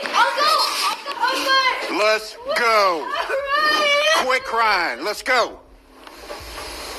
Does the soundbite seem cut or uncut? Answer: cut